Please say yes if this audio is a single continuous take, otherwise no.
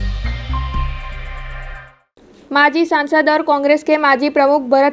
no